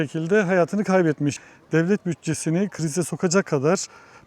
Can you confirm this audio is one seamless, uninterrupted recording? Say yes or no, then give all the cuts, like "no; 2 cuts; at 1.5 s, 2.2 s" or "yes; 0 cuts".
no; 1 cut; at 1.4 s